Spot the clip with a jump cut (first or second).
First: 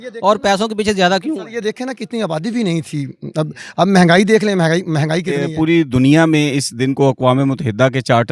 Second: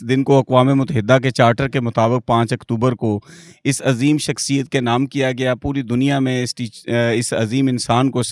first